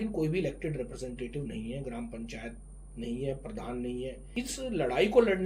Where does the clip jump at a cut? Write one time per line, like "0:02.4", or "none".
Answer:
0:04.3